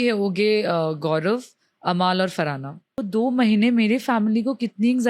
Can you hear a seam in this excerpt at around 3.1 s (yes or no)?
yes